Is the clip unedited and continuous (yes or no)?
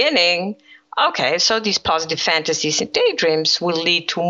yes